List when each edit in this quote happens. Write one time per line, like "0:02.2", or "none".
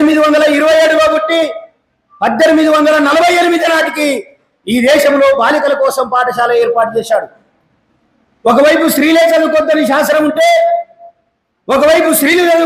none